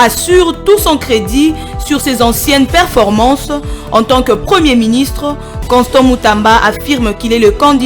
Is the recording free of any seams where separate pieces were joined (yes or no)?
yes